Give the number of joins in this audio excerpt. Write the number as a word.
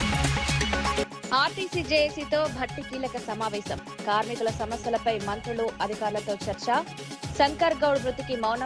one